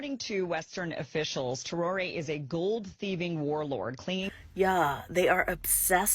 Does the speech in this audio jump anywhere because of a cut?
no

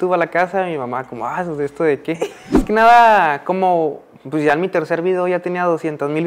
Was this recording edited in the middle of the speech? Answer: yes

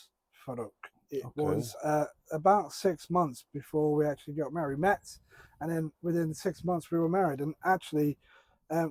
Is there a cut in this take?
no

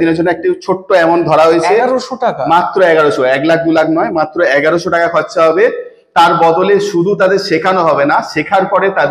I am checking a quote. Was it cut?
no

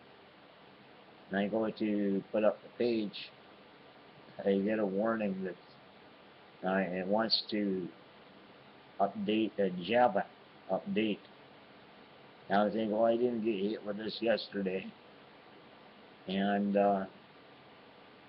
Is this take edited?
no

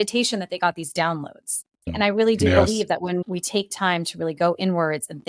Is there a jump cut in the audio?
yes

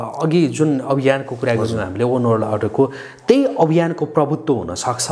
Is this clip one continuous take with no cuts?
yes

